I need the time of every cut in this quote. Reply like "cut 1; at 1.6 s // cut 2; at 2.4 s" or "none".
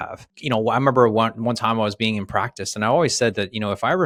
none

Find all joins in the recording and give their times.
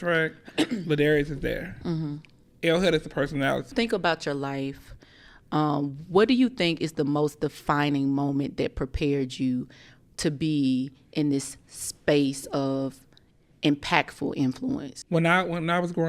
cut 1; at 3.7 s // cut 2; at 14.9 s

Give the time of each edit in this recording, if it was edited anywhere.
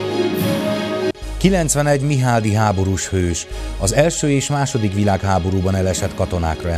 cut 1; at 1.1 s

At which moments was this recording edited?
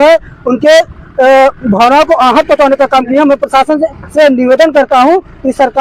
none

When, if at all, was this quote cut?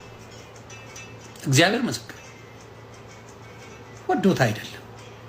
cut 1; at 3.3 s

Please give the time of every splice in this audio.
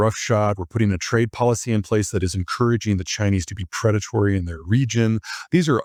none

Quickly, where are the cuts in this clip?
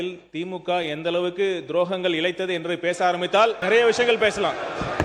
cut 1; at 3.6 s

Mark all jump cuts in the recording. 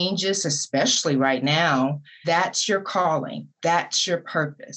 cut 1; at 2.1 s // cut 2; at 3.4 s

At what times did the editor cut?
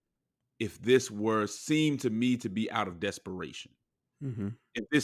none

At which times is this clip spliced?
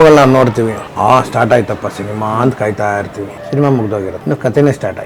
cut 1; at 0.8 s // cut 2; at 3.3 s // cut 3; at 4.2 s

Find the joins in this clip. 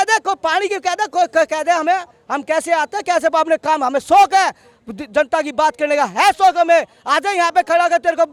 none

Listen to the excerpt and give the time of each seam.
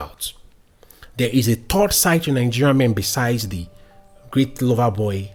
none

